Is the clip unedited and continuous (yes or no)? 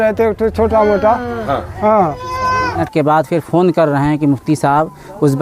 no